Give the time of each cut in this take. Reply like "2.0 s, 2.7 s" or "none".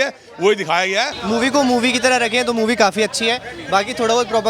1.2 s